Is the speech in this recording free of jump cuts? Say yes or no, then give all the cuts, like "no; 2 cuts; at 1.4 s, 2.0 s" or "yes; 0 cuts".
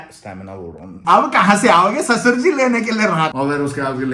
no; 2 cuts; at 1.0 s, 3.3 s